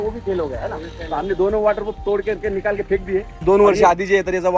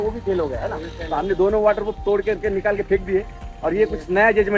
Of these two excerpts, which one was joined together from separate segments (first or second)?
first